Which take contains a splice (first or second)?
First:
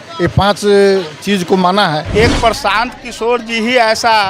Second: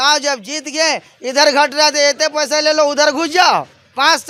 first